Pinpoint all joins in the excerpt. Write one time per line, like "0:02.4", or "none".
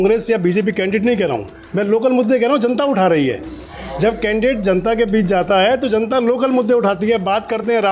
none